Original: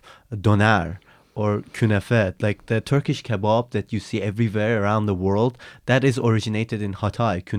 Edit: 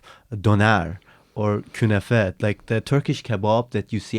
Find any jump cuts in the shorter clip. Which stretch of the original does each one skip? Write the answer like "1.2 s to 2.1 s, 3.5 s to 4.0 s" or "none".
none